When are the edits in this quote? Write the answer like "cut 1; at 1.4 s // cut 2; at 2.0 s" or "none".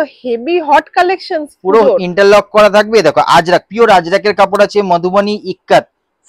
none